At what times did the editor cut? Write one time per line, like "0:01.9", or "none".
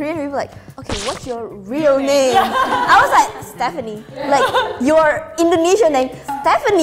none